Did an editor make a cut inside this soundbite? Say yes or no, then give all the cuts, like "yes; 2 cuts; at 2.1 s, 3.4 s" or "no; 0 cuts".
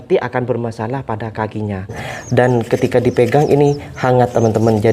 yes; 1 cut; at 2.0 s